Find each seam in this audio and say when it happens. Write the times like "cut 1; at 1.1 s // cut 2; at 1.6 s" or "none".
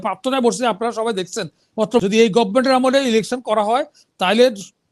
cut 1; at 2.0 s